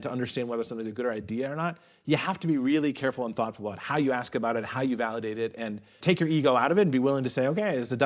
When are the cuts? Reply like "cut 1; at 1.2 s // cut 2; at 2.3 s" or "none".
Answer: none

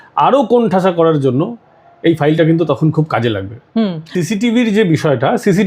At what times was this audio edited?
cut 1; at 4.1 s

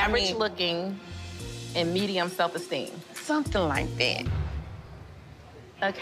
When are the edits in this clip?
cut 1; at 4.2 s

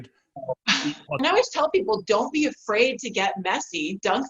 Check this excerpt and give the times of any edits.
cut 1; at 1.1 s

